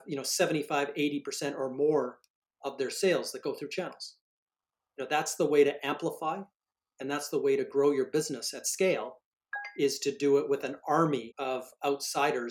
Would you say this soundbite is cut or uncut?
cut